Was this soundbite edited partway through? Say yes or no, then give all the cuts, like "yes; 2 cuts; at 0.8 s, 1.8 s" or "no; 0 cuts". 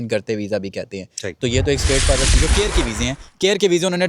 yes; 1 cut; at 2.4 s